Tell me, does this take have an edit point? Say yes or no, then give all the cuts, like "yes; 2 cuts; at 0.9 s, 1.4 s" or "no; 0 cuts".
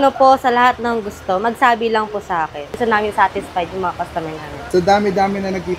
yes; 2 cuts; at 2.8 s, 4.6 s